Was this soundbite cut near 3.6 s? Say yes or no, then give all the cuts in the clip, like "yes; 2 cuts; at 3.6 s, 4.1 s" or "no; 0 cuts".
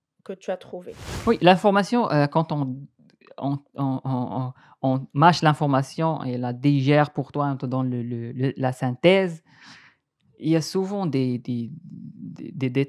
no; 1 cut; at 1.2 s